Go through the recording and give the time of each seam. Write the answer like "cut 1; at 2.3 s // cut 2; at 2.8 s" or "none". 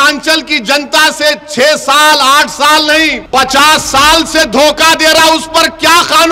cut 1; at 3.2 s